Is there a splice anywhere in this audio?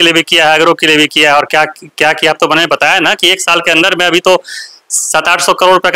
no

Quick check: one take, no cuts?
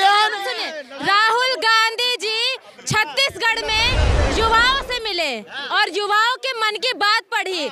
yes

